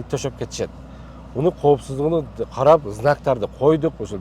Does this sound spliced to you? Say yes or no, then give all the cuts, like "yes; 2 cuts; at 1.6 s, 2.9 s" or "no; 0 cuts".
no; 0 cuts